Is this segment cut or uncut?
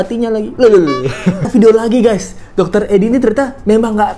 cut